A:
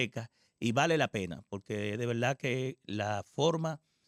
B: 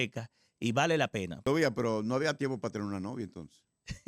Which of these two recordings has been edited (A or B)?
B